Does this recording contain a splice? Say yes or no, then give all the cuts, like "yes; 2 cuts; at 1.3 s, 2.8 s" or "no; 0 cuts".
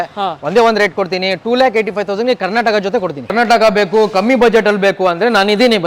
yes; 1 cut; at 3.3 s